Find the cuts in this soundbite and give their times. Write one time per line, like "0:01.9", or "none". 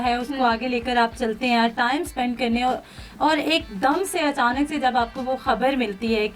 none